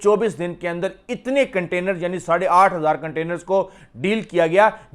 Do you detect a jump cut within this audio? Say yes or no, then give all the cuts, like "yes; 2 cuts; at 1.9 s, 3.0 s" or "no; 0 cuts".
no; 0 cuts